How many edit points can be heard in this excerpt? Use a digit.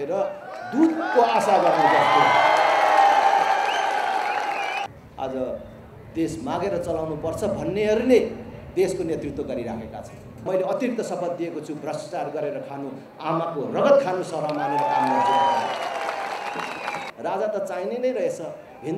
3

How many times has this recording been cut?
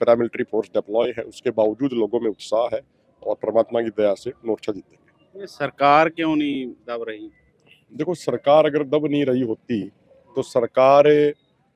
0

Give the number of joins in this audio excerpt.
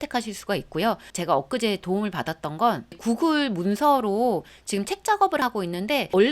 2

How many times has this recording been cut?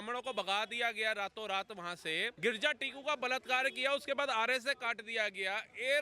1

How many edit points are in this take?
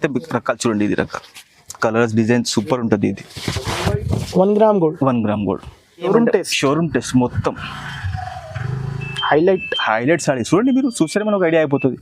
1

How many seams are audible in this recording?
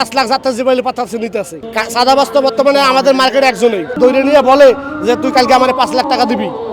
2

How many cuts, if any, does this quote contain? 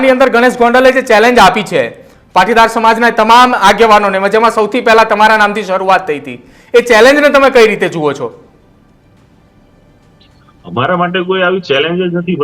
0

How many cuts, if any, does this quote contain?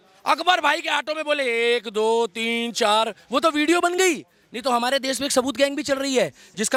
0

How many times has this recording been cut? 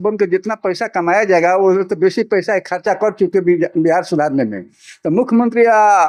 0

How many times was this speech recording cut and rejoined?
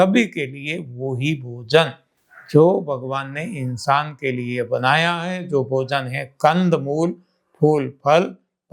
0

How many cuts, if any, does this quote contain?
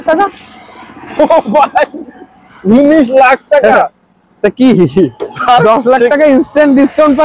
0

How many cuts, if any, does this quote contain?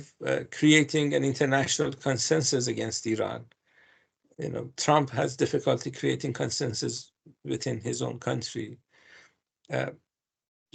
0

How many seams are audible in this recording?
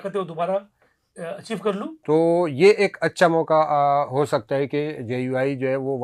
1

